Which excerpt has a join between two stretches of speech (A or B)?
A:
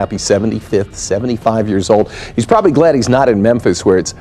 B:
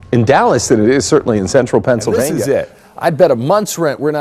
B